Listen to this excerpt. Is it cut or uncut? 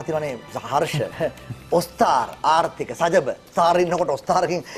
cut